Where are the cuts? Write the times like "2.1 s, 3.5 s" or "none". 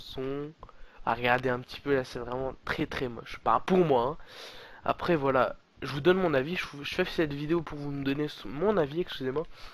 none